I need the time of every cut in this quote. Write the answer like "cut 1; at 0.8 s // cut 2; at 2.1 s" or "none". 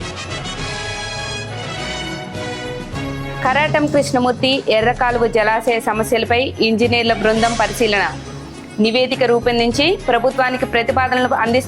cut 1; at 2.9 s